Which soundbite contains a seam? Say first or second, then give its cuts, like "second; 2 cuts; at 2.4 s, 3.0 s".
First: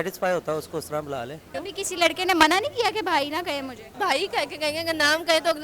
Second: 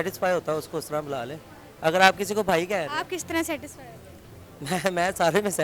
first; 2 cuts; at 1.5 s, 3.8 s